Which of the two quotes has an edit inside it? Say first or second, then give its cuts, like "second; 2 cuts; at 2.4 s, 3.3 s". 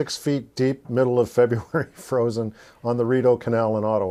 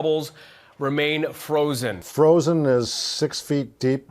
second; 1 cut; at 2.0 s